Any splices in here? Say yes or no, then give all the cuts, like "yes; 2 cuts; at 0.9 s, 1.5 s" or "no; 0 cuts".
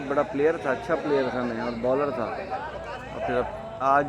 no; 0 cuts